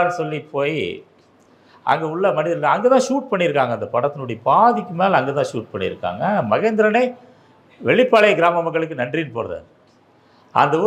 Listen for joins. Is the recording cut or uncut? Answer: uncut